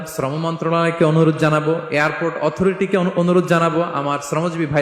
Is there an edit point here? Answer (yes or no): no